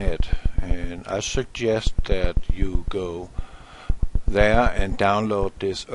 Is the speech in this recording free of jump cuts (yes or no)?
yes